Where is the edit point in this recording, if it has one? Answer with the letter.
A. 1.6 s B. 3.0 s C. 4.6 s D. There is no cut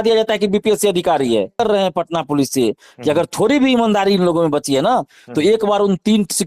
A